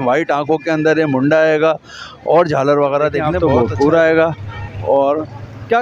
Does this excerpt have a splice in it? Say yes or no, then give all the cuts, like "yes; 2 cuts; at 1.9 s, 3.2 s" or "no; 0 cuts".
yes; 1 cut; at 3.3 s